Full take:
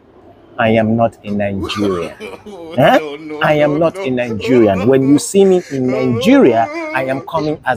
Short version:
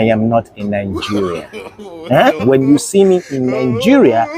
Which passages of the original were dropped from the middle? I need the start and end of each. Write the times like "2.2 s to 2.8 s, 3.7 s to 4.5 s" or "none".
3.1 s to 4.8 s